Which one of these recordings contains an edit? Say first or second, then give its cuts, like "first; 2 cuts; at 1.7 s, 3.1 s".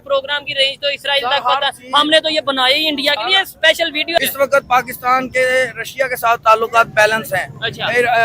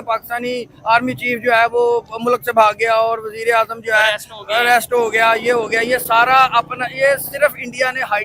first; 1 cut; at 4.2 s